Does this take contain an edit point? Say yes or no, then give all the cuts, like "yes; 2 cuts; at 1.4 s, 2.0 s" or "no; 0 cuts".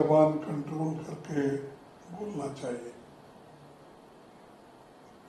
no; 0 cuts